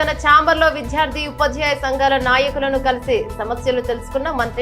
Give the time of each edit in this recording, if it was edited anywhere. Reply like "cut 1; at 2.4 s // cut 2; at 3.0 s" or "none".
none